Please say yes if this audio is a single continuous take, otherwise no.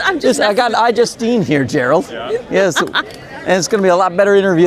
yes